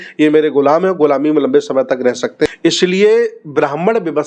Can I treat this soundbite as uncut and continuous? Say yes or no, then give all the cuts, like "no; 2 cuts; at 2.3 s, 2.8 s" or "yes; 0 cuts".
no; 1 cut; at 2.5 s